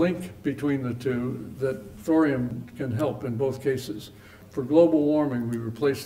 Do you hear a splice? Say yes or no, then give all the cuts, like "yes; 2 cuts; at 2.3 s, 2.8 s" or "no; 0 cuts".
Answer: yes; 3 cuts; at 1.9 s, 2.6 s, 4.4 s